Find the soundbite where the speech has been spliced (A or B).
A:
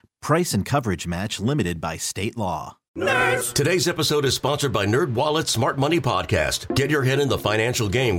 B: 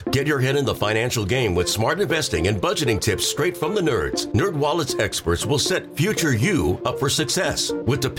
A